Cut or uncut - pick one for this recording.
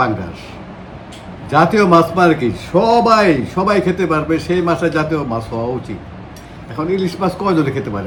uncut